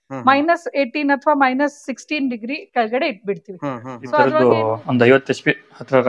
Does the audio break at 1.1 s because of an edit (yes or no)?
no